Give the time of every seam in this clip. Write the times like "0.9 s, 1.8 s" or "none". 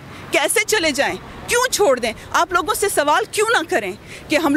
none